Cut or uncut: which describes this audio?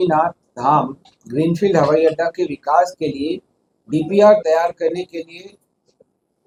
uncut